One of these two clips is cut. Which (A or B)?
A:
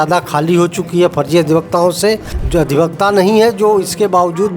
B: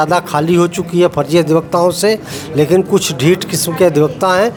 A